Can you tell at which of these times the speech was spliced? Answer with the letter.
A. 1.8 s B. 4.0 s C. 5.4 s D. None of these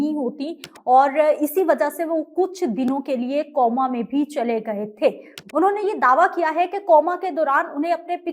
D